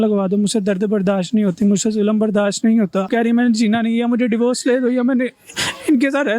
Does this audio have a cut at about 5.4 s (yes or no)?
no